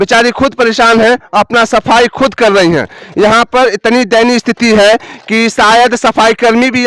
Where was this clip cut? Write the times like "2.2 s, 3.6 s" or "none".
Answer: none